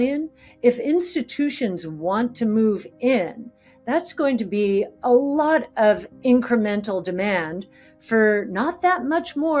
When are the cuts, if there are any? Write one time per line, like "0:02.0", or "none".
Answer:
none